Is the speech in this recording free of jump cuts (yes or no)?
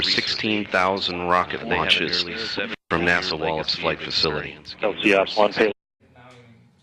yes